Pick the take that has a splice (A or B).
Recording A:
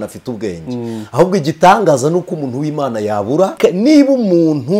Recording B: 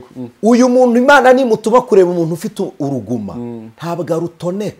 A